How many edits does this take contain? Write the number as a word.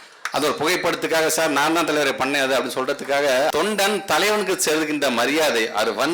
one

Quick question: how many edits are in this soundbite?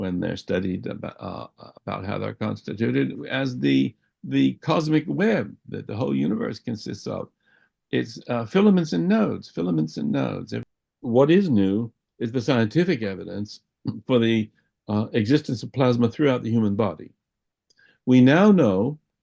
one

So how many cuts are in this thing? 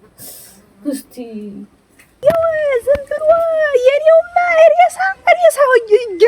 one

